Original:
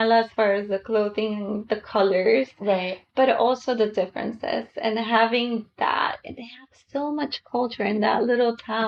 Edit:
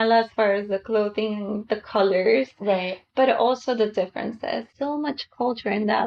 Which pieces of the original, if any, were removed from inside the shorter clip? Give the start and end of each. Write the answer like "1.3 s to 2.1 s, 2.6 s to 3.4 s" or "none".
4.7 s to 6.8 s